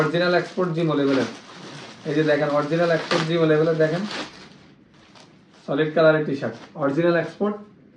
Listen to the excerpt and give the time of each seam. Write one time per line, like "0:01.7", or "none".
none

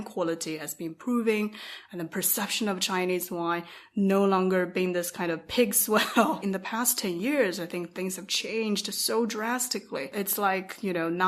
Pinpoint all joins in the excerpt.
0:06.4
0:10.1

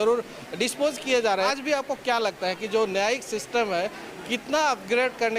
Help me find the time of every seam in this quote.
0:01.5

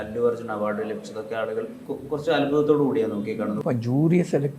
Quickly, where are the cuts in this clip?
0:01.9
0:03.6

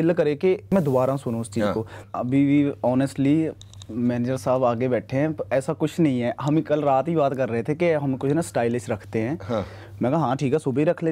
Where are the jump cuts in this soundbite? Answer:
0:02.0

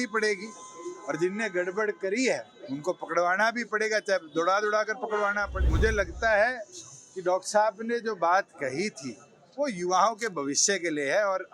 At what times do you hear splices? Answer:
0:05.7

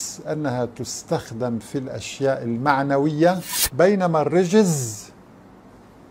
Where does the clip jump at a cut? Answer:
0:03.6

